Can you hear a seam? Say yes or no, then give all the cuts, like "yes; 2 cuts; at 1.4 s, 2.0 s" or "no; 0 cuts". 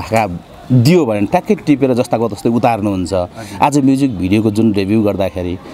no; 0 cuts